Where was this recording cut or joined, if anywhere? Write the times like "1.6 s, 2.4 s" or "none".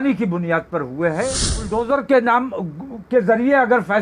1.8 s

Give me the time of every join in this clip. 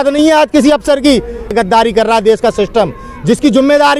1.5 s

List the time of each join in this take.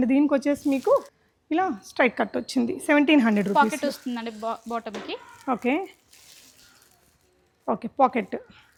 none

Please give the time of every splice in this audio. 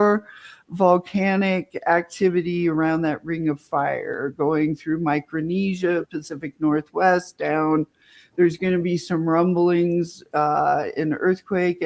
none

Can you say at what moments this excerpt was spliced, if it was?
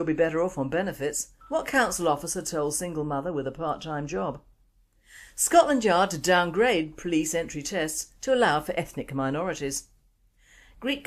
7.3 s

